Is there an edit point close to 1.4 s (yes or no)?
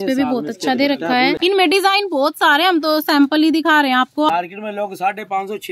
yes